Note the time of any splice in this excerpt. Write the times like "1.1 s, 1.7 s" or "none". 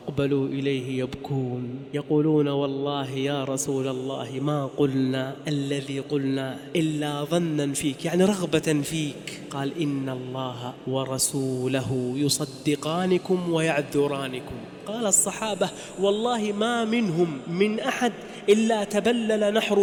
none